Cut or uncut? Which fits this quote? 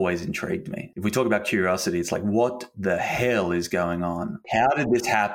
cut